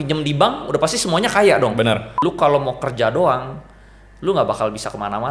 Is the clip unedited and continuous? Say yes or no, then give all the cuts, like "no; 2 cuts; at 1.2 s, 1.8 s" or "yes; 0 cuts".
no; 1 cut; at 2.1 s